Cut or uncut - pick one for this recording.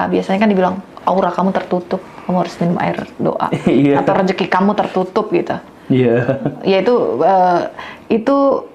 uncut